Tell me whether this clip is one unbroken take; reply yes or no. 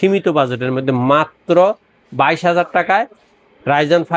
yes